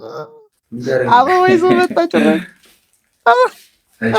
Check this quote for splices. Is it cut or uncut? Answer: uncut